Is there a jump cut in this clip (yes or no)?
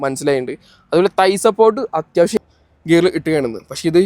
yes